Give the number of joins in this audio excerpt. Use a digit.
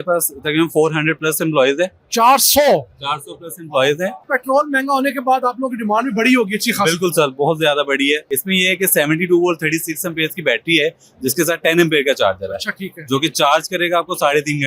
2